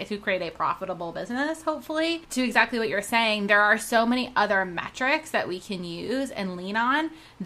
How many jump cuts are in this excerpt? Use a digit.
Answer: 1